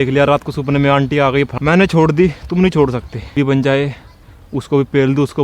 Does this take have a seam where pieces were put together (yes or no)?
yes